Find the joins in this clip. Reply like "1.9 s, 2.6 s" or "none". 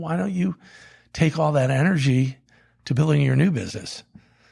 none